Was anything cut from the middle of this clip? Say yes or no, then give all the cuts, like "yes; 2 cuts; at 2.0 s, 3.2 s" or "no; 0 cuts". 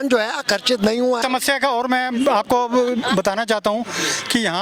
yes; 1 cut; at 1.2 s